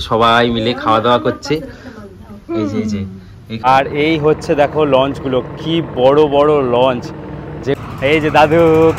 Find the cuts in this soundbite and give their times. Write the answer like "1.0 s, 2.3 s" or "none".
3.6 s, 7.8 s